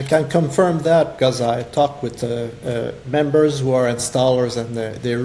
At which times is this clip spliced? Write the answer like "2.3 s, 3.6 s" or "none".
none